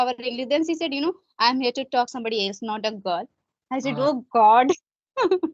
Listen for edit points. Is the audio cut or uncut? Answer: uncut